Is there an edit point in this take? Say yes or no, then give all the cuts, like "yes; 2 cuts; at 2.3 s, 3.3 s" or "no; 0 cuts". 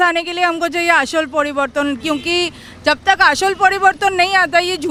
no; 0 cuts